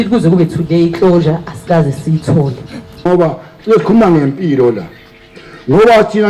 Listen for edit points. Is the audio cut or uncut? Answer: cut